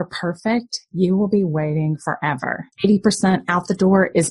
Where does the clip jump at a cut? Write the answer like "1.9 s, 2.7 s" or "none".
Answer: 2.6 s